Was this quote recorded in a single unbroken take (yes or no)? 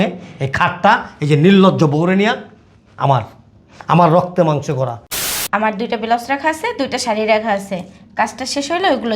no